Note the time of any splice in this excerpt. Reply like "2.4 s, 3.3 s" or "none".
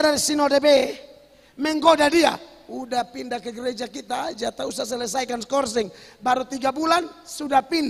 none

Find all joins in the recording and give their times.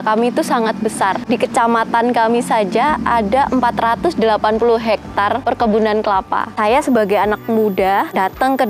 6.5 s

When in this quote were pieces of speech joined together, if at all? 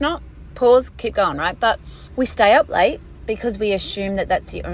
0.9 s, 1.9 s, 3.2 s

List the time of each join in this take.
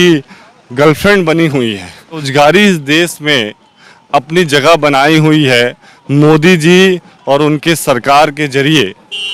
2.3 s

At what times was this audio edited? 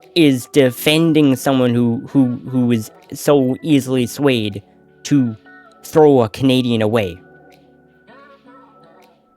7.2 s

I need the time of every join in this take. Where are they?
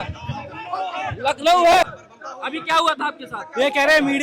1.8 s

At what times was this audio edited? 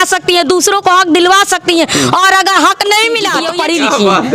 3.4 s

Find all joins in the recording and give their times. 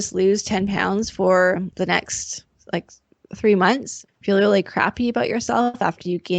3.9 s

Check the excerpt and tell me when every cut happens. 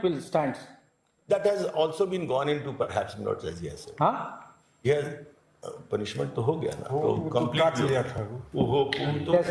none

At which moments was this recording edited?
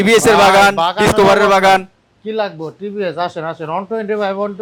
none

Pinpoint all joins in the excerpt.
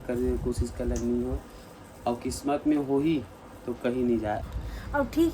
4.4 s

